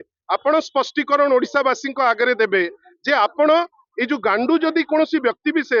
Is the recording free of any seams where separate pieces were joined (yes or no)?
yes